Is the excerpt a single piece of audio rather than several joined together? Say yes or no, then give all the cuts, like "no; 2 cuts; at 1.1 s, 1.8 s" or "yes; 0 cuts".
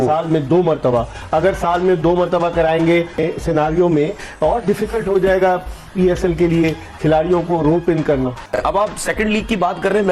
no; 2 cuts; at 3.2 s, 8.6 s